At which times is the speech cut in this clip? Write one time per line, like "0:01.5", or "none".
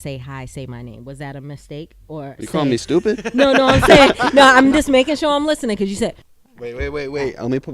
0:06.2